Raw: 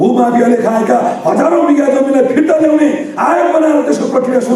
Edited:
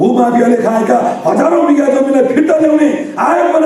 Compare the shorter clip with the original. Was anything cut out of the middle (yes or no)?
no